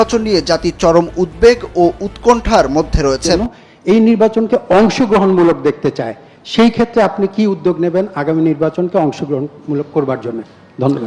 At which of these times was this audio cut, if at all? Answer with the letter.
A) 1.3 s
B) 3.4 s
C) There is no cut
B